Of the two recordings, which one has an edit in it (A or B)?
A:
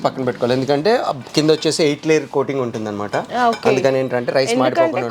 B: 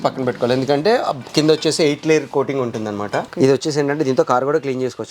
B